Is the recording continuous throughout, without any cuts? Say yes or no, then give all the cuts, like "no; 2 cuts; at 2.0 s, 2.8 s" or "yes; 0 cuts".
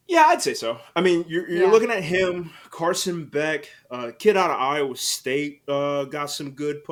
yes; 0 cuts